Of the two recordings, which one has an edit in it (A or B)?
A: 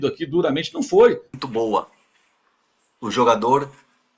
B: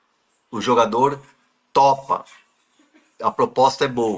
A